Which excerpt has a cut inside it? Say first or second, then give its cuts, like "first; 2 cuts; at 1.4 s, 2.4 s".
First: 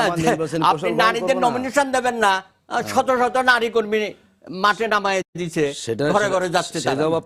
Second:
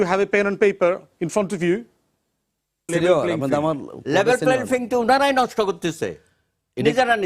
second; 1 cut; at 2.9 s